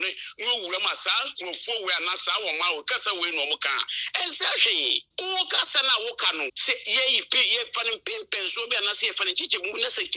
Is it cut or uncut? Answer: cut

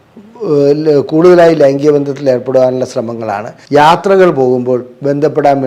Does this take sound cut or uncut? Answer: cut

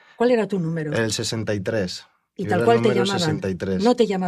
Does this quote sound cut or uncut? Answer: uncut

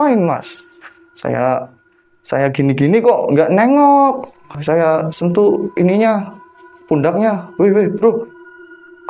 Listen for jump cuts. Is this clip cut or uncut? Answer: uncut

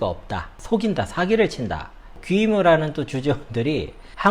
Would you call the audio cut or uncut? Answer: cut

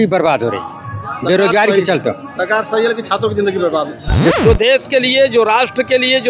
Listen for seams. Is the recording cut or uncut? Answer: cut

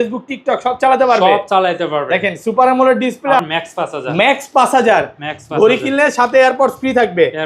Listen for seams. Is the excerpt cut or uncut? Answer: cut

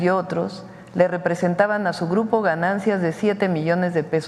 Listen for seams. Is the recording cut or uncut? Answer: uncut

